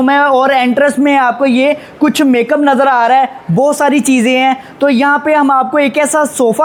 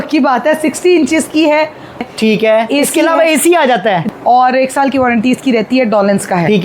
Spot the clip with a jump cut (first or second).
second